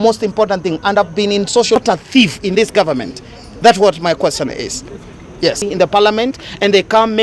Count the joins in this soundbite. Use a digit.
2